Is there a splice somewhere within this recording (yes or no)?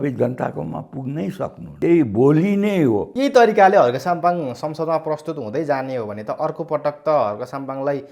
yes